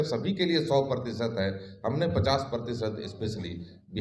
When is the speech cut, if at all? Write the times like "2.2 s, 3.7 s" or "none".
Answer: none

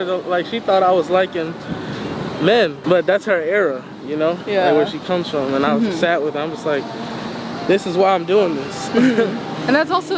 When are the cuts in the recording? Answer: none

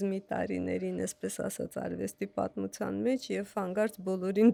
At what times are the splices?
none

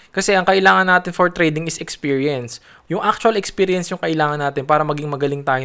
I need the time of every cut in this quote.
2.7 s

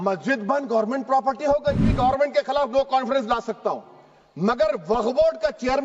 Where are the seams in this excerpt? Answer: 1.9 s

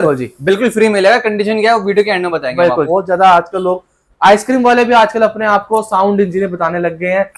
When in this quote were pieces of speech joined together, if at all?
2.9 s

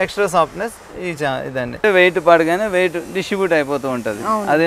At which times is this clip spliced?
1.8 s

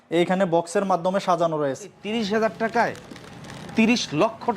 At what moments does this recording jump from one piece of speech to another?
2.0 s

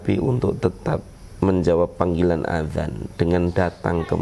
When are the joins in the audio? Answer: none

